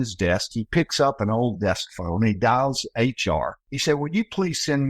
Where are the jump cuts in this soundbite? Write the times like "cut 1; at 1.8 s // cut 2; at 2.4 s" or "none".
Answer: cut 1; at 3.7 s